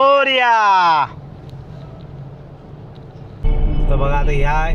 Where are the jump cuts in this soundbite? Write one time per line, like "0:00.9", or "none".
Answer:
none